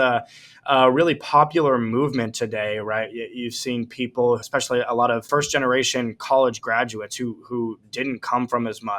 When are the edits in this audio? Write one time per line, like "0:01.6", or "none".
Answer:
0:04.4
0:05.2